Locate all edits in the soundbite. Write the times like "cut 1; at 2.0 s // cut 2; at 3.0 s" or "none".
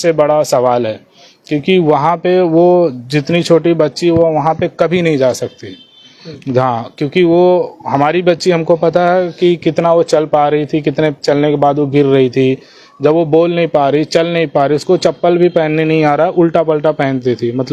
none